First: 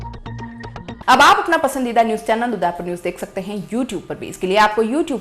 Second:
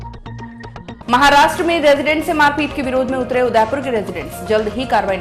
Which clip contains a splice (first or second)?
second